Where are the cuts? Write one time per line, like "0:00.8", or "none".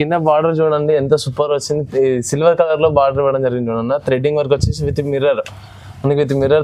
none